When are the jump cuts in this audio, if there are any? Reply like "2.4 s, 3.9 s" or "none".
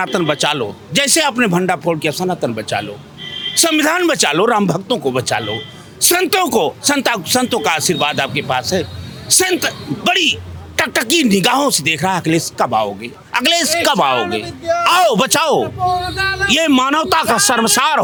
none